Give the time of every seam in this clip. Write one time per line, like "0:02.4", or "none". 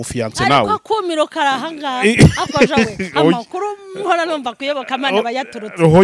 none